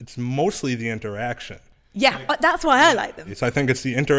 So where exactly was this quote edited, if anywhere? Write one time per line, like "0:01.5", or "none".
0:03.2